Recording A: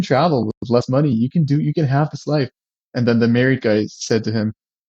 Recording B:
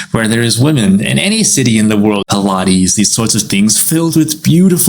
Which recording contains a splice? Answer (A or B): B